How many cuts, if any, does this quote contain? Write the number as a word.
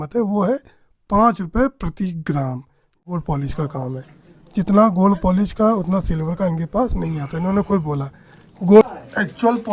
two